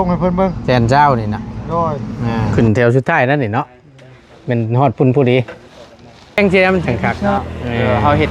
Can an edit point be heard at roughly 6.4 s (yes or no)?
yes